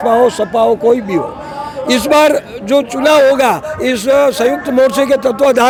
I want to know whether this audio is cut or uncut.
uncut